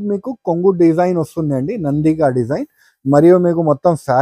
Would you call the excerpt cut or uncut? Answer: uncut